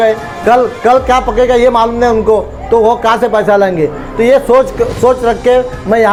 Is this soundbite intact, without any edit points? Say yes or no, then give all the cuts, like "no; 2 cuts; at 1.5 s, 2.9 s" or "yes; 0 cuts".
yes; 0 cuts